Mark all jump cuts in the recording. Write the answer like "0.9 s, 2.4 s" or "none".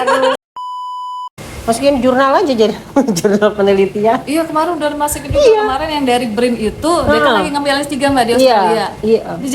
1.0 s